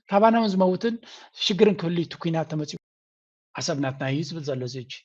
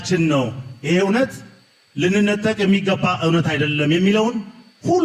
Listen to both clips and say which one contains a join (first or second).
first